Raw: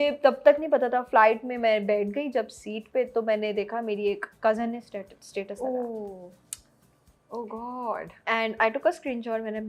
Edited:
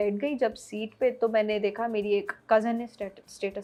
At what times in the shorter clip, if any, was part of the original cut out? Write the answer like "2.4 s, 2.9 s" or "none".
none